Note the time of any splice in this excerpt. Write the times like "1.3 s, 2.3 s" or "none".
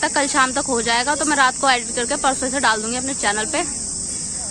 none